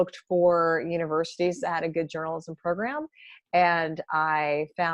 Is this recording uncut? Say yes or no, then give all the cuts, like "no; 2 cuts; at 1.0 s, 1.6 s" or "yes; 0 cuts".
yes; 0 cuts